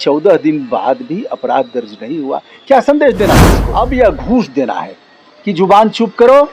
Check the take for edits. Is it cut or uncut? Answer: cut